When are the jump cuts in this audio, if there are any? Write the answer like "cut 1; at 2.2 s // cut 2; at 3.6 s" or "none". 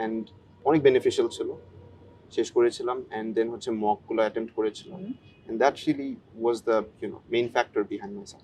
none